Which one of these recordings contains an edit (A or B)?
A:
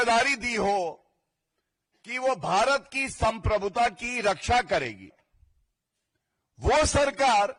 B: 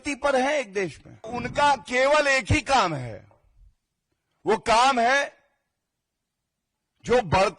B